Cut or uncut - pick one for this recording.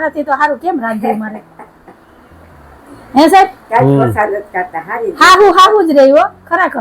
uncut